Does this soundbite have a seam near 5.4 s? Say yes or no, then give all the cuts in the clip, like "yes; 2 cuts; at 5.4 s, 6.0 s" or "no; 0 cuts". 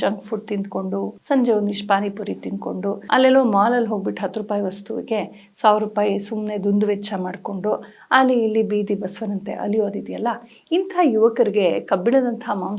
no; 2 cuts; at 1.1 s, 3.0 s